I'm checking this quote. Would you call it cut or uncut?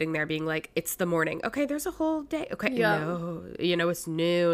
uncut